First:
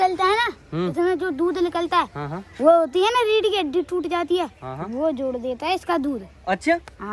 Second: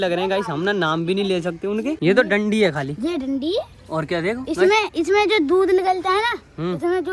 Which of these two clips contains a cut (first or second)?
second